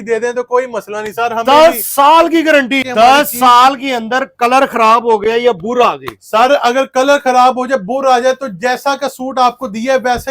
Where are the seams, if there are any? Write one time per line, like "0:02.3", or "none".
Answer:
0:02.8